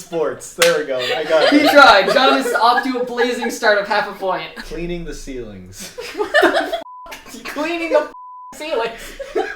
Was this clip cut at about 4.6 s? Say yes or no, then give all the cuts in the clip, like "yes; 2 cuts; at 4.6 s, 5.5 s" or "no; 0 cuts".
yes; 1 cut; at 4.6 s